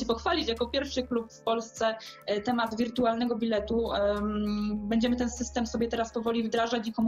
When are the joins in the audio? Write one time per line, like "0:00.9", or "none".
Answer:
none